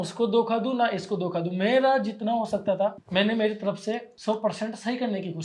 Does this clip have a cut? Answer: yes; 2 cuts; at 3.0 s, 4.1 s

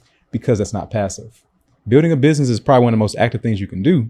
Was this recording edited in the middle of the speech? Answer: no; 0 cuts

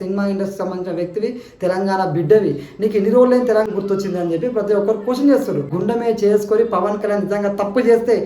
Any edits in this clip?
yes; 2 cuts; at 3.7 s, 5.7 s

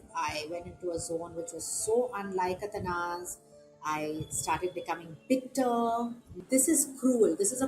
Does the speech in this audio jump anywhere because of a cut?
yes; 1 cut; at 6.2 s

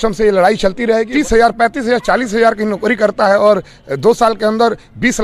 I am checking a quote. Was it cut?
yes; 1 cut; at 1.1 s

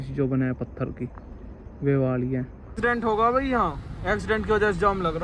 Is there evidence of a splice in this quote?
yes; 1 cut; at 2.6 s

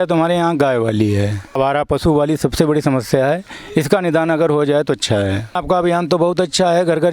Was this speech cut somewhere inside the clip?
yes; 2 cuts; at 1.6 s, 5.6 s

